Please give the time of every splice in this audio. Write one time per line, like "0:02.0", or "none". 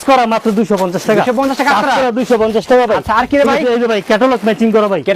none